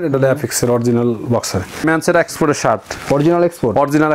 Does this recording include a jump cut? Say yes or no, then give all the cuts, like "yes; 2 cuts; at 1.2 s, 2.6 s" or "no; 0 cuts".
yes; 1 cut; at 1.8 s